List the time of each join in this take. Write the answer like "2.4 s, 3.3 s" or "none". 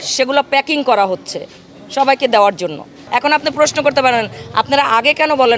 none

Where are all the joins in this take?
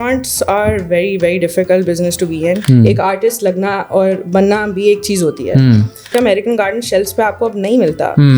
2.6 s, 6.1 s

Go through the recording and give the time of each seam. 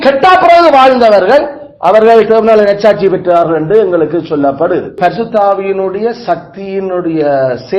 5.0 s

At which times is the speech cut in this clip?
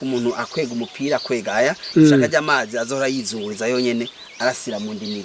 none

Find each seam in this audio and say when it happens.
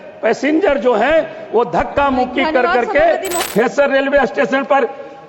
3.4 s

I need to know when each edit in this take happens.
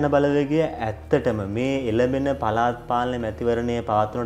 none

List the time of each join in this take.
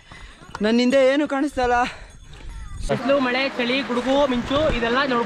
2.9 s

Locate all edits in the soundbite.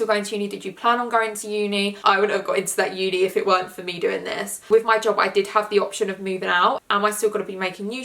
1.9 s, 4.5 s, 6.8 s

